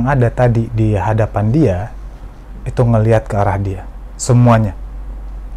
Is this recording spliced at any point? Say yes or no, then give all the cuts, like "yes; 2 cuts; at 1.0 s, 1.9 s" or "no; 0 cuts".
no; 0 cuts